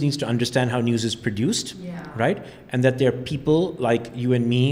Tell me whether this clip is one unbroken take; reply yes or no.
yes